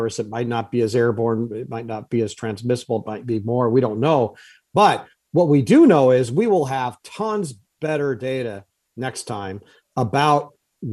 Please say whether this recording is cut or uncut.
uncut